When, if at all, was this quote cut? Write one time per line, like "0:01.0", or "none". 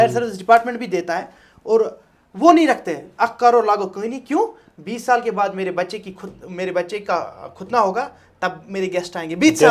none